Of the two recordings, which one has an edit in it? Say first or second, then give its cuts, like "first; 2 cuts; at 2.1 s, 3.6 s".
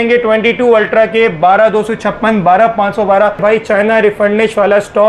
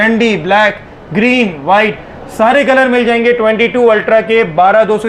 first; 1 cut; at 3.4 s